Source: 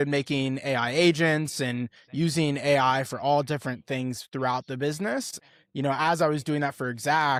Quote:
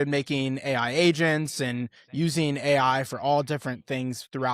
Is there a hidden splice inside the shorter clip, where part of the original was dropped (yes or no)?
no